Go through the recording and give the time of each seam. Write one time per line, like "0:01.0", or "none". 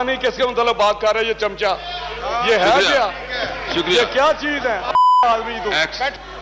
none